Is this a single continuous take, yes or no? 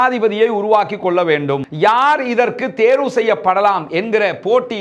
no